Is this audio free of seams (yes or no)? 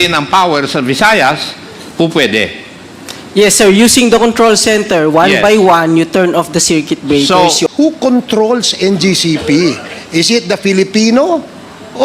no